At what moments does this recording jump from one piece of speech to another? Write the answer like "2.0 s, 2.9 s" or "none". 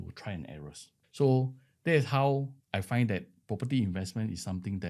1.0 s, 2.6 s